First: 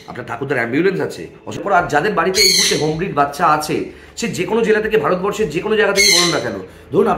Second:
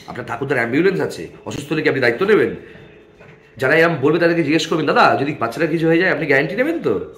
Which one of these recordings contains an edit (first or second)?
first